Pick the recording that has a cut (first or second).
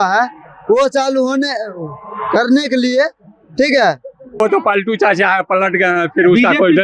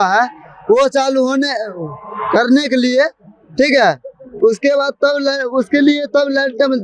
first